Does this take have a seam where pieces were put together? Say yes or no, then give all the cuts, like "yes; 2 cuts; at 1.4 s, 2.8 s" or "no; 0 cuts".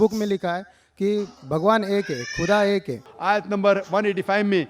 yes; 1 cut; at 3.1 s